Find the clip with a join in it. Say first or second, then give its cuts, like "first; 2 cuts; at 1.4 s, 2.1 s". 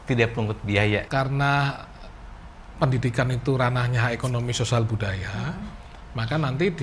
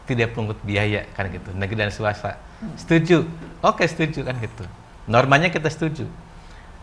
first; 1 cut; at 1.1 s